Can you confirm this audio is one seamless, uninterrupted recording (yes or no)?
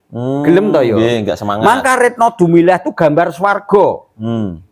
yes